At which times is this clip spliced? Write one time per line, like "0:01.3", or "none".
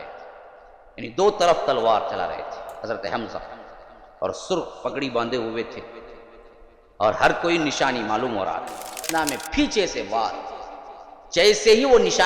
0:09.0